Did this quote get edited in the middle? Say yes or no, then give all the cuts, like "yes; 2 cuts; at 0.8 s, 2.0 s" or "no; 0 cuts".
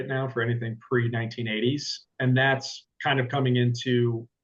yes; 1 cut; at 2.1 s